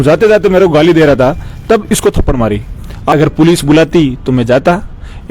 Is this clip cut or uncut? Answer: cut